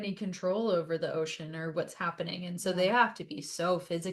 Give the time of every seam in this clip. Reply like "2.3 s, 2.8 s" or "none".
none